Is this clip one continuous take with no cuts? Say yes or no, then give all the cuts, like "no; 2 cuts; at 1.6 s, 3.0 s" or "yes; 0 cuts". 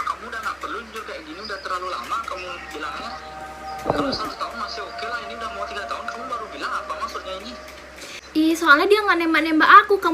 no; 1 cut; at 8.2 s